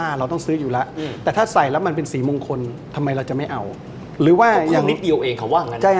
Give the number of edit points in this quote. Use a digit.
0